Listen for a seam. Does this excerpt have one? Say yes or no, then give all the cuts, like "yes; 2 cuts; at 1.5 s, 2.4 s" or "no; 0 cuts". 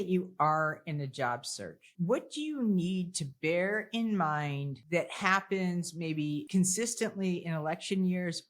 yes; 3 cuts; at 1.9 s, 4.7 s, 6.4 s